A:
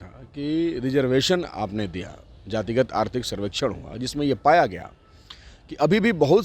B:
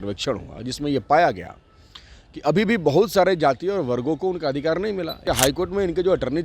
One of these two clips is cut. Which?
B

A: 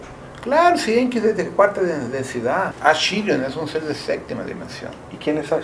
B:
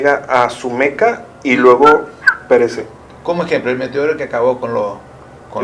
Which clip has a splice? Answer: A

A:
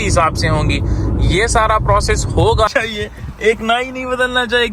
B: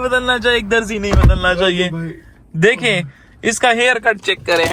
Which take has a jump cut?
A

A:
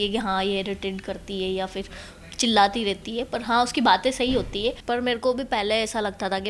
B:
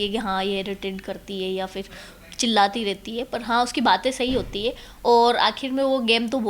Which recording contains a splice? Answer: A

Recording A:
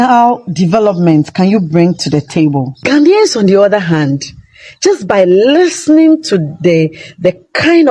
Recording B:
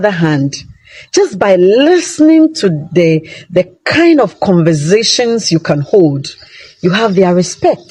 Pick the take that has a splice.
A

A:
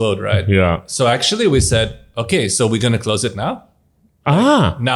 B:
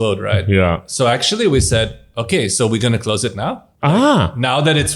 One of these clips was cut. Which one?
B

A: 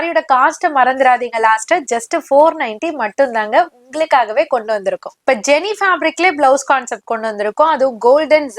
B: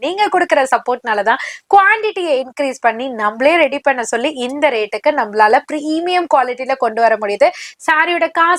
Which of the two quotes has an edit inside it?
A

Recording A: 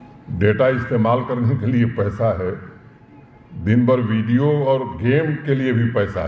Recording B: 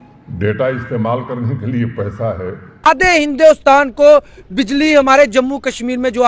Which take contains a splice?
B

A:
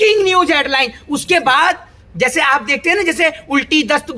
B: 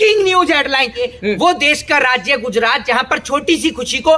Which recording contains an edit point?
B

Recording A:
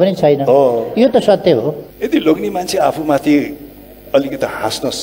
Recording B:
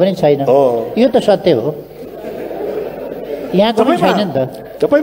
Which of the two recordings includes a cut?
A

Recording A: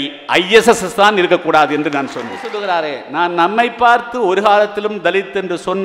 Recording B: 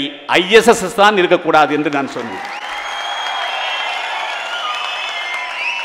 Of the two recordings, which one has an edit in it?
A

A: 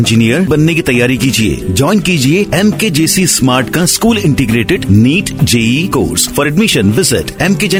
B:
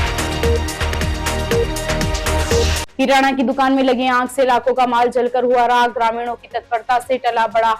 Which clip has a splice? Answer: B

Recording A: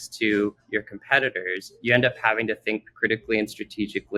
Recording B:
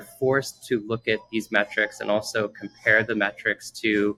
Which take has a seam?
A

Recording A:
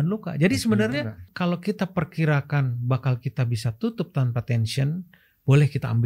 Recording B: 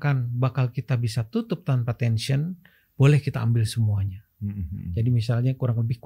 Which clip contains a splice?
A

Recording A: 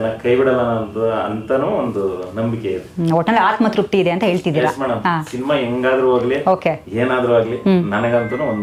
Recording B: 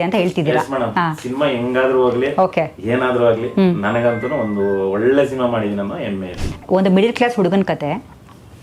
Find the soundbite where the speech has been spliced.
B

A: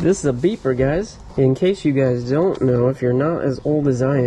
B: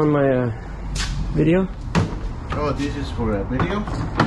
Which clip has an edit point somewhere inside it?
A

